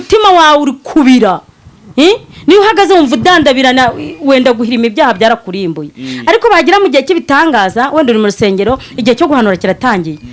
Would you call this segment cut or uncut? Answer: uncut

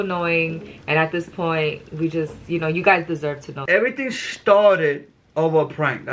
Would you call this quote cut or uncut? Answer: cut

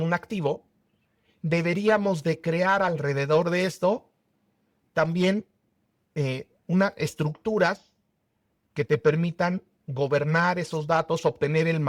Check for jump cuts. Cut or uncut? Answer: uncut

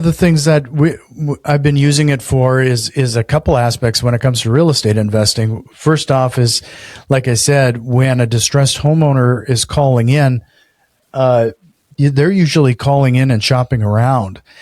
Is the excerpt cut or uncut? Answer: uncut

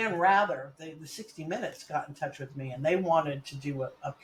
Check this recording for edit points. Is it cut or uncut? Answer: uncut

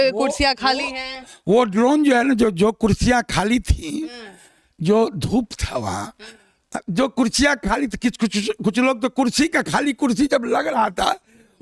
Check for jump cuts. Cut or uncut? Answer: uncut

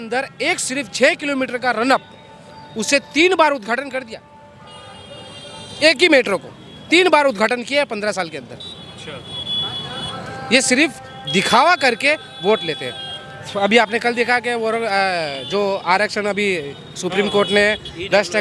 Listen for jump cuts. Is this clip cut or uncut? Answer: uncut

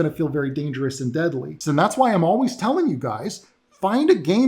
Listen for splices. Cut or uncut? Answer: cut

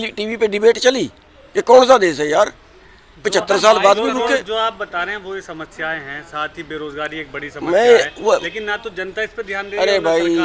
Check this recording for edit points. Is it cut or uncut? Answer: uncut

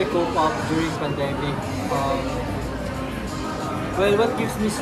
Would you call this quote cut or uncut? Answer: uncut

